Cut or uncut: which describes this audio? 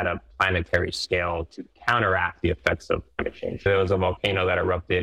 cut